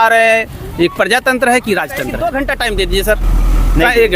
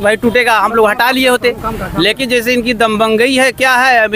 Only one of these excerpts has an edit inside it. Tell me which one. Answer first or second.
first